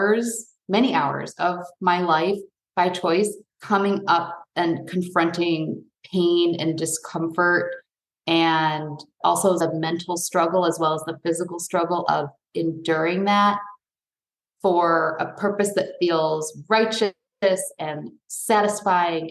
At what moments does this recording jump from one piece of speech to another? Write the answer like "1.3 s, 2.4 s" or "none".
3.5 s, 9.1 s